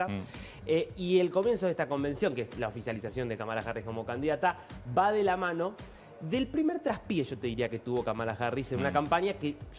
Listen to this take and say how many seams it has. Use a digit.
0